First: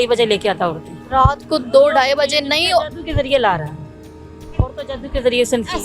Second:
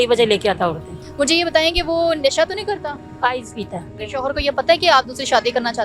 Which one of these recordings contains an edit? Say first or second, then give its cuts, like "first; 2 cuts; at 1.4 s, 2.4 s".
second; 2 cuts; at 1.0 s, 4.0 s